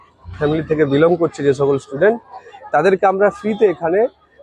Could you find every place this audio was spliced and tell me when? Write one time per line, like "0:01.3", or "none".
0:03.2